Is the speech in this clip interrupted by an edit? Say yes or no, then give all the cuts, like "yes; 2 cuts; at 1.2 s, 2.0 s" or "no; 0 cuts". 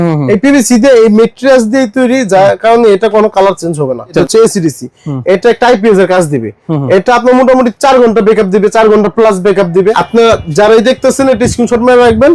yes; 2 cuts; at 4.2 s, 10.0 s